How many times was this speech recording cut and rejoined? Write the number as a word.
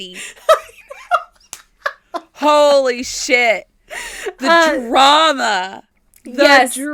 zero